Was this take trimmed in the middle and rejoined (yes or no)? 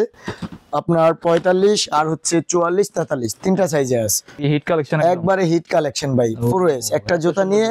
yes